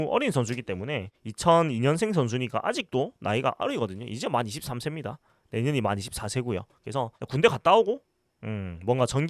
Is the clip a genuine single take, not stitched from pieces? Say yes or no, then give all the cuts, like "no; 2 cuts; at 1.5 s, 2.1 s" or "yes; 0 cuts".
yes; 0 cuts